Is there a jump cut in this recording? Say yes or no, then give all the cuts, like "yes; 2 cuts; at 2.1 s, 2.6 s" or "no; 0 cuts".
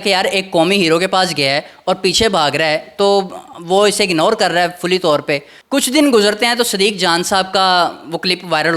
yes; 1 cut; at 5.5 s